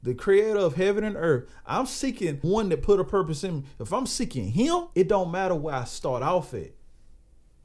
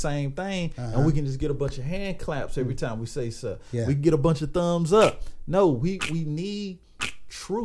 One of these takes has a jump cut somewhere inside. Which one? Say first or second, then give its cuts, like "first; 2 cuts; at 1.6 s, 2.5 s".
first; 2 cuts; at 2.4 s, 4.9 s